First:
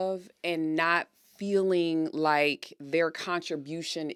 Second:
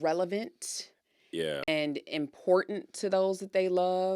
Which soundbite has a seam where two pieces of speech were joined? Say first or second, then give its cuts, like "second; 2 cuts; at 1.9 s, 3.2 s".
second; 1 cut; at 1.7 s